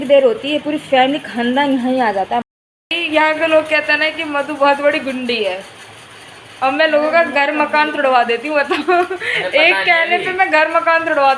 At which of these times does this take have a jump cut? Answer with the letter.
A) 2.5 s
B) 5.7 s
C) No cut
A